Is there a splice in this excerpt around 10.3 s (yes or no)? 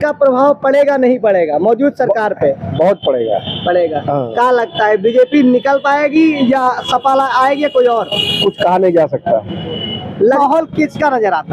yes